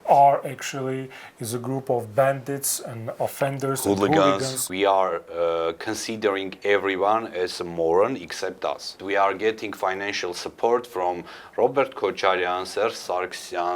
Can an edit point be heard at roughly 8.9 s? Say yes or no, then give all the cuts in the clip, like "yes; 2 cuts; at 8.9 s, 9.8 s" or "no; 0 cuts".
yes; 2 cuts; at 4.7 s, 8.9 s